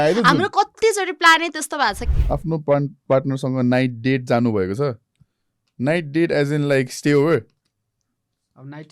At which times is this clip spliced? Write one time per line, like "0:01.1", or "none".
0:02.0